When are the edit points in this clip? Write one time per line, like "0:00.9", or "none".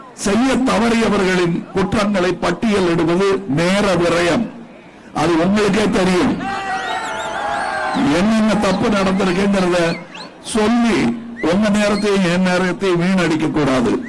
none

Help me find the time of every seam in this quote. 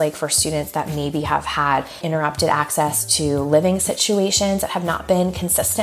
0:02.0

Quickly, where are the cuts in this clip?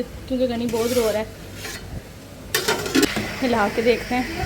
0:03.1

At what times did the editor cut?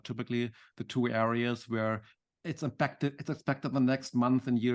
0:02.1

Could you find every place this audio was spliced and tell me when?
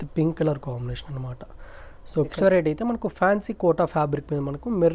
0:02.3

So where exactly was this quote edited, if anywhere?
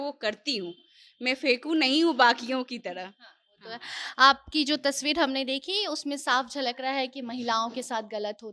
none

